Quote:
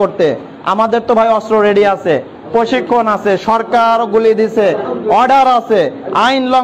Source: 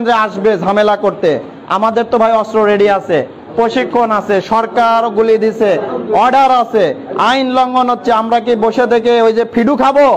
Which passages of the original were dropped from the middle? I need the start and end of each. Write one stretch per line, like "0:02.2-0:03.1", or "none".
none